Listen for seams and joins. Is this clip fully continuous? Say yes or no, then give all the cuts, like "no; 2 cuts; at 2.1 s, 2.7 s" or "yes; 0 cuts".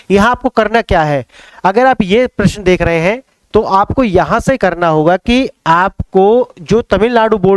yes; 0 cuts